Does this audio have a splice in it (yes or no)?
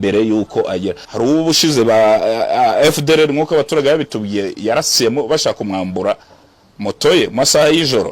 yes